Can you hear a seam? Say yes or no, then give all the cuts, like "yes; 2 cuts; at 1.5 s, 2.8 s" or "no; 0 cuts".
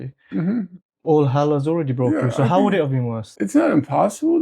yes; 1 cut; at 3.2 s